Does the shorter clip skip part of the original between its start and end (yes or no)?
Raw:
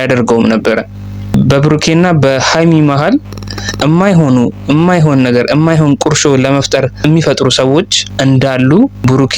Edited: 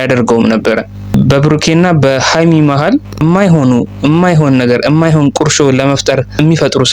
yes